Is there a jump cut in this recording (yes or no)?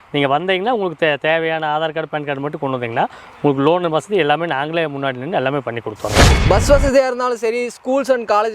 yes